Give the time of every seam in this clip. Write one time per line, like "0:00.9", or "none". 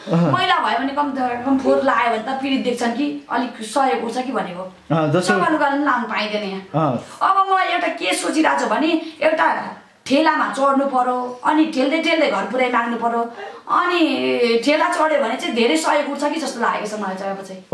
none